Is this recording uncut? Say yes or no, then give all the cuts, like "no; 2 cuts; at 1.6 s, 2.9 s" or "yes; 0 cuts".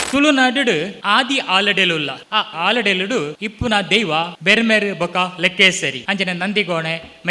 no; 5 cuts; at 0.9 s, 2.5 s, 3.4 s, 4.3 s, 6.0 s